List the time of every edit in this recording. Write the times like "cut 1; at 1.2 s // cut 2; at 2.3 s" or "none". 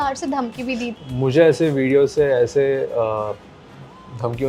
cut 1; at 0.9 s

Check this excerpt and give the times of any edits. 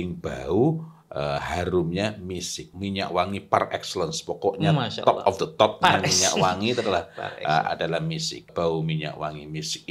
cut 1; at 2.7 s // cut 2; at 8.5 s

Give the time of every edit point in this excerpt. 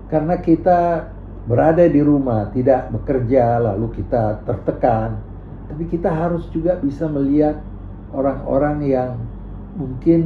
none

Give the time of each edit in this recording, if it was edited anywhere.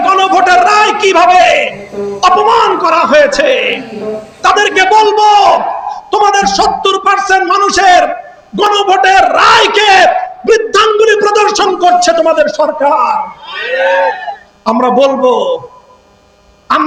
none

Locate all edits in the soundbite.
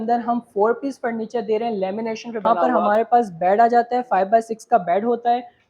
cut 1; at 2.4 s

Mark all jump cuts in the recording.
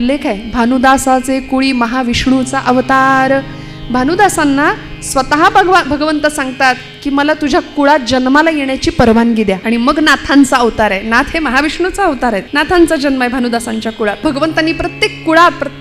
cut 1; at 9.6 s // cut 2; at 12.5 s // cut 3; at 14.2 s

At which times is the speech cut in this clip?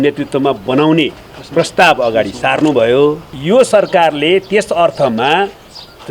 cut 1; at 3.3 s

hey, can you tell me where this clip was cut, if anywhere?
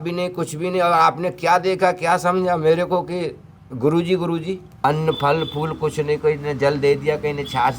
cut 1; at 4.8 s

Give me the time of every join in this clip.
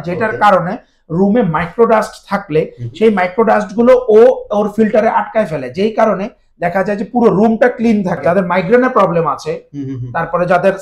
cut 1; at 8.2 s

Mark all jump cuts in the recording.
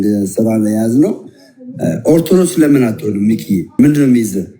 cut 1; at 3.7 s

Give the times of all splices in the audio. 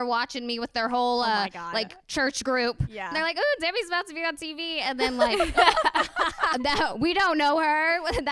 cut 1; at 3.2 s

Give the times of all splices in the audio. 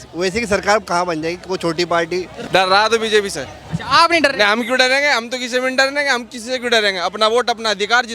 cut 1; at 2.3 s

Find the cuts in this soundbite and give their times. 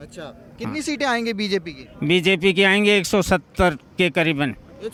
none

